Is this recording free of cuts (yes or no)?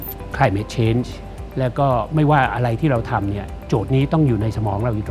yes